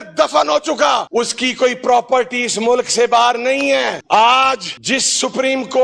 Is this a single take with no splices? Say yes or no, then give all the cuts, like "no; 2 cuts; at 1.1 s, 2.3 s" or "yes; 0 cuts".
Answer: no; 2 cuts; at 1.1 s, 4.0 s